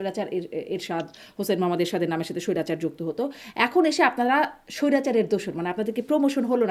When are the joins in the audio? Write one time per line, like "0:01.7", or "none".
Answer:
none